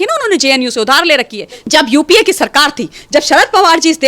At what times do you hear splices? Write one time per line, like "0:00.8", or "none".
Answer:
0:01.6